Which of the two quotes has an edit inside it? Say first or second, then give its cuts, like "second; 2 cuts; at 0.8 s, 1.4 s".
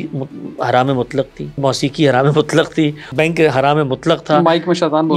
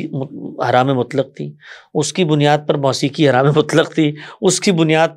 first; 2 cuts; at 1.6 s, 3.1 s